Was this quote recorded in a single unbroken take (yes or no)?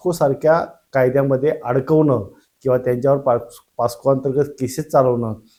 yes